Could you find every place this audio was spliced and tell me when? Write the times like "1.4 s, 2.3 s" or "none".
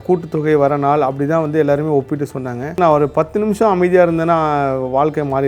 2.8 s